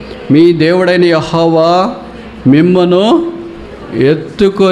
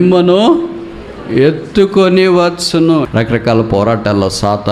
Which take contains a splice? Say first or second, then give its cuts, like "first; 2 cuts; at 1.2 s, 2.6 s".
second; 1 cut; at 3.1 s